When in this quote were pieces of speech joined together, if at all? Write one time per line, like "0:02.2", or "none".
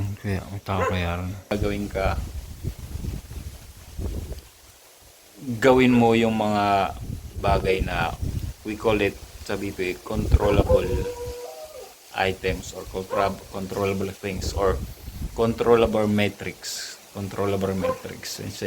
0:01.5